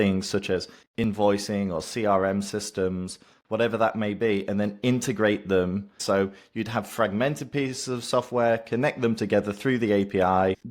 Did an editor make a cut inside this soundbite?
yes; 1 cut; at 5.9 s

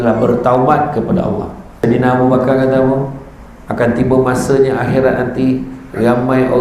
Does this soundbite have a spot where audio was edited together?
yes; 1 cut; at 1.7 s

